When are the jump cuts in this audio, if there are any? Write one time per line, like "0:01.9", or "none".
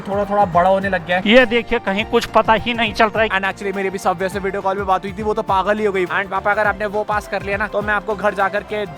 0:01.2
0:03.3
0:06.1